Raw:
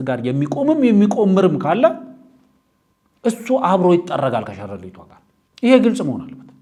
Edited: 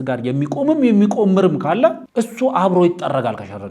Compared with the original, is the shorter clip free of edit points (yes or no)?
no